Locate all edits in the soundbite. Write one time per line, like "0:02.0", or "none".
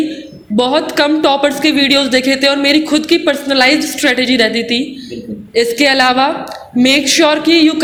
none